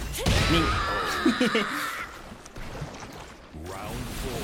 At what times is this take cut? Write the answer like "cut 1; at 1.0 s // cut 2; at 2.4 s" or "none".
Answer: none